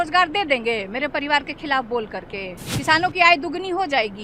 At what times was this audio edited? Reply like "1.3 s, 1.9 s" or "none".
2.7 s